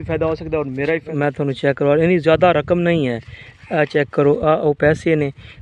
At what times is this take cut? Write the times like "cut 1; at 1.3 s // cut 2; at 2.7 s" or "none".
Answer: cut 1; at 1.1 s